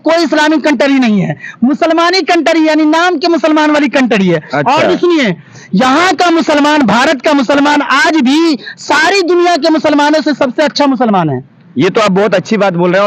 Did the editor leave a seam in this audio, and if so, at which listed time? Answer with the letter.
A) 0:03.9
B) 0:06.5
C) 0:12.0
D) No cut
D